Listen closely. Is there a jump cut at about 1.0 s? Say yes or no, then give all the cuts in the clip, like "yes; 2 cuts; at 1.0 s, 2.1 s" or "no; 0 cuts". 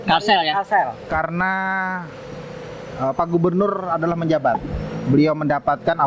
yes; 1 cut; at 1.0 s